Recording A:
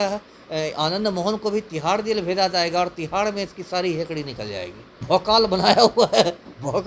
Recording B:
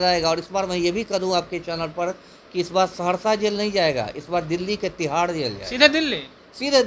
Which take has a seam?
A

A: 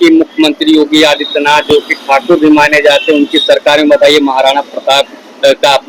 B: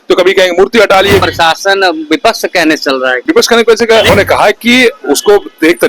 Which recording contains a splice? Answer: B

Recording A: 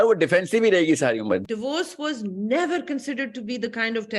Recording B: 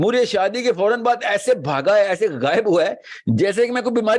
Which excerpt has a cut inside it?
A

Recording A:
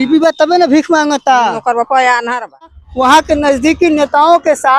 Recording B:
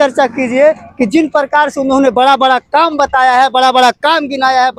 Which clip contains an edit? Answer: A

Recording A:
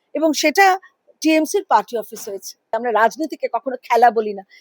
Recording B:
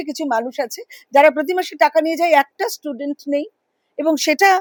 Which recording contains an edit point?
A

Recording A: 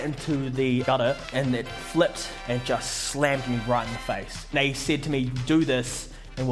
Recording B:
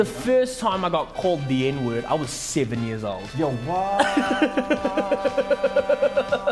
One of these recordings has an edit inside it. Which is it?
A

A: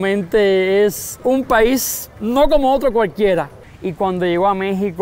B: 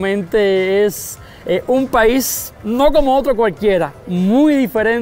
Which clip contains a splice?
A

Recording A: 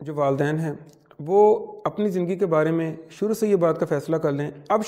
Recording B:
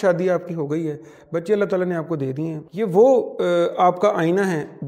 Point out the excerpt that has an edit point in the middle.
B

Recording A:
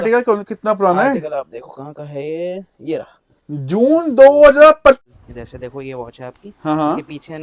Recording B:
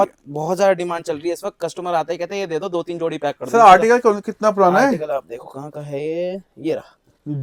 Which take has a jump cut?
A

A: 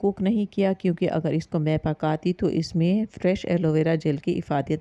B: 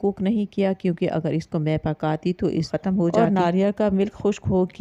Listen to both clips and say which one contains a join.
B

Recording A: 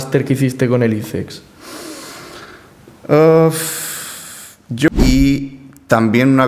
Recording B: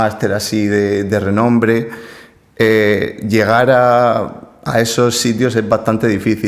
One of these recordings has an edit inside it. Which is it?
A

